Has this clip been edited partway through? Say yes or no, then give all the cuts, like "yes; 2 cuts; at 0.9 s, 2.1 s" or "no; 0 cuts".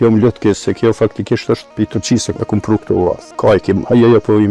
yes; 2 cuts; at 1.8 s, 3.3 s